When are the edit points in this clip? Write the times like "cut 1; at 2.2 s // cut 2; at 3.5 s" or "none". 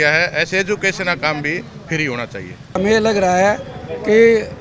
cut 1; at 2.8 s